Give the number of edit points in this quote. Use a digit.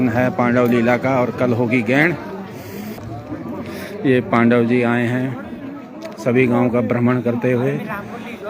1